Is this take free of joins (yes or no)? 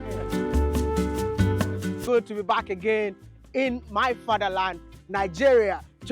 no